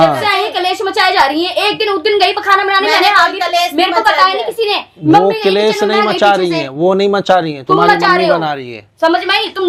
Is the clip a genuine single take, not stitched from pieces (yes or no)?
yes